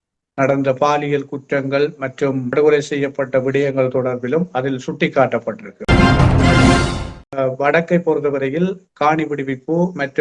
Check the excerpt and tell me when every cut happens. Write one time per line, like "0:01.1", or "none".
0:02.5
0:05.7
0:07.2